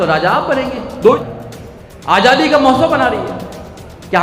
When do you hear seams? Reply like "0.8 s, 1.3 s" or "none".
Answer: 1.2 s